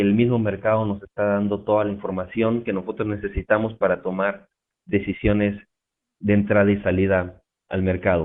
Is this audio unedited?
no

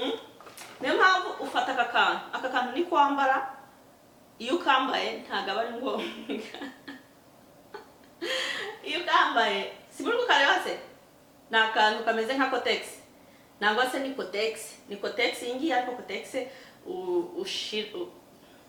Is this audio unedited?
yes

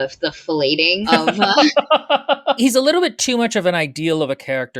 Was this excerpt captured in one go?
no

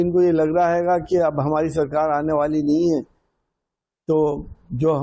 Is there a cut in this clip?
no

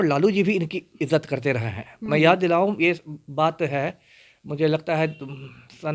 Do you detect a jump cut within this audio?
no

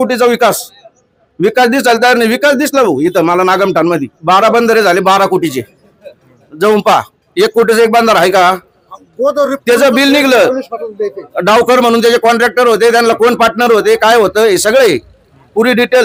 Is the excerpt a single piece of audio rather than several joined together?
yes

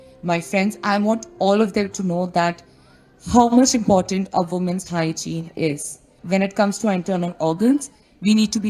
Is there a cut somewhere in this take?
yes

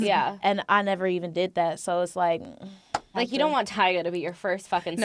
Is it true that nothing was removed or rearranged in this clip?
no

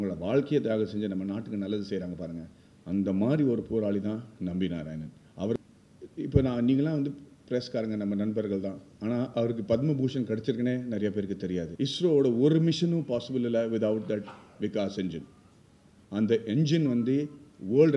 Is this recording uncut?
no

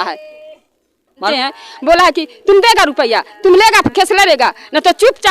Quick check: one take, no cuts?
no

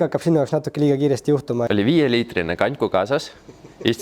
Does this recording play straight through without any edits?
no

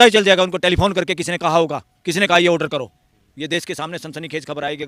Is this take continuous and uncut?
yes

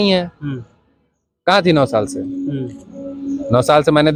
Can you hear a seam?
no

